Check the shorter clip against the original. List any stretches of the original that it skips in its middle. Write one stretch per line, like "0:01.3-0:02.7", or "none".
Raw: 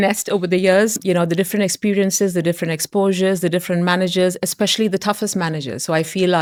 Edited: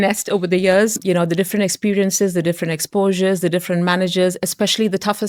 none

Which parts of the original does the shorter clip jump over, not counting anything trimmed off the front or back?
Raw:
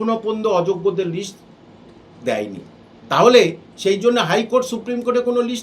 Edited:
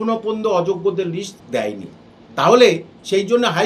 0:01.4-0:02.1

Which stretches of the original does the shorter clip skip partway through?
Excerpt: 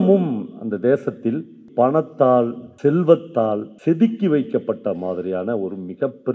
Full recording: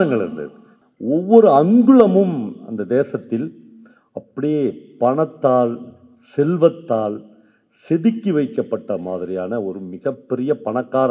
0:03.7-0:04.8
0:05.9-0:06.2
0:07.2-0:07.7

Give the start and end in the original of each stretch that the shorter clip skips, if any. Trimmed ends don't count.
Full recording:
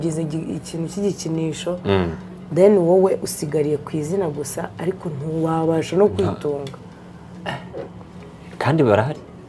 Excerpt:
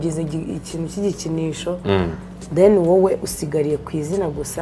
none

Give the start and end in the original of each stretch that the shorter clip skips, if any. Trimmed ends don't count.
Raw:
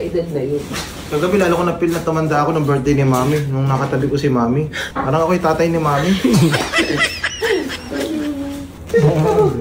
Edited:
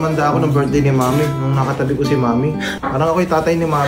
none

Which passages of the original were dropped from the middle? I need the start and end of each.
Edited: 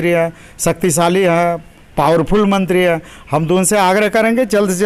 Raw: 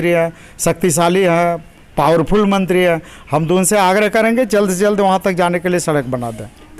none

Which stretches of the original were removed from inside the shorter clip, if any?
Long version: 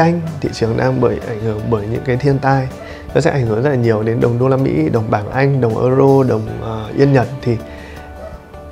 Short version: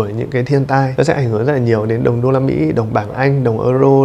0:02.6-0:03.1

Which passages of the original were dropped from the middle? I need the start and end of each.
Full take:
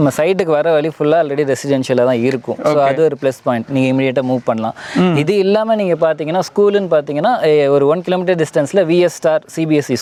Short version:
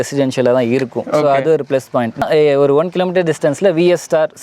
0:03.7-0:07.3

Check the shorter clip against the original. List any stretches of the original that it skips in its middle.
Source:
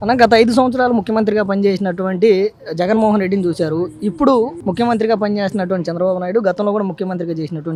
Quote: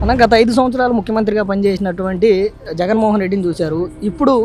none

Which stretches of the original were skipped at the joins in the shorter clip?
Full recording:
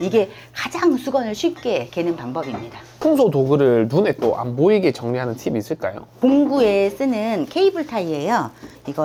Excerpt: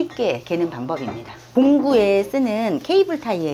0:02.8-0:06.0

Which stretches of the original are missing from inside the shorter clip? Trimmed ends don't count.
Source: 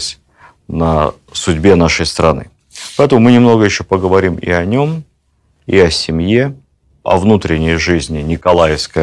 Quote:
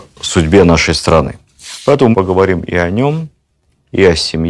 0:03.1-0:03.7

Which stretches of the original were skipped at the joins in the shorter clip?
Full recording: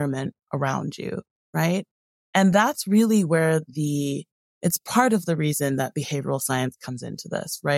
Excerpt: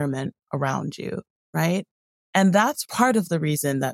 0:02.8-0:04.8

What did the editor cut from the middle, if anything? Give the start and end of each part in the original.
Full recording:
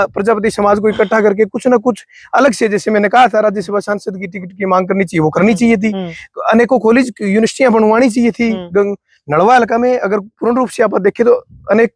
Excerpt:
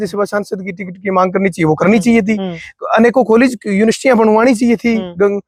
none

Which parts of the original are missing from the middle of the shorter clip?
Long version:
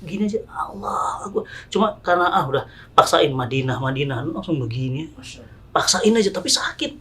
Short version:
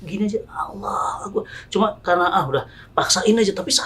0:02.8-0:05.5

